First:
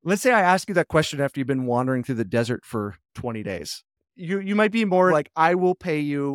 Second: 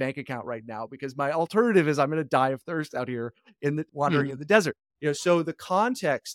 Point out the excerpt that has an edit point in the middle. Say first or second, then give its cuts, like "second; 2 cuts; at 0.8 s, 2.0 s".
first; 1 cut; at 5.1 s